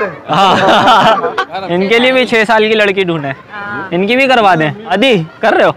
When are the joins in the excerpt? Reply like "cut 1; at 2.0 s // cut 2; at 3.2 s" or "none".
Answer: cut 1; at 1.4 s // cut 2; at 4.9 s